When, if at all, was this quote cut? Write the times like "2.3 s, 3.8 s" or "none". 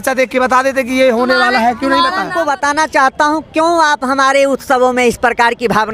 2.3 s